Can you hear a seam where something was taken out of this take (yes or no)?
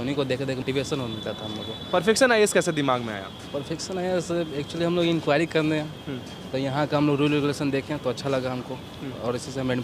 no